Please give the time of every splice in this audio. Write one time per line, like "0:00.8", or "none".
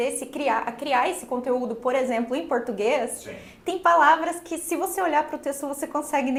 none